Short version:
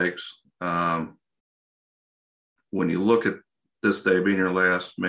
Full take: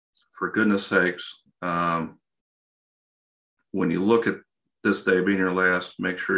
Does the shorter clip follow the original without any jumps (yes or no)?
yes